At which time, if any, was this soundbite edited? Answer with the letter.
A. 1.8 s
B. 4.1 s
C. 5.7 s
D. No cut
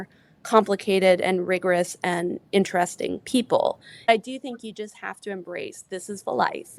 B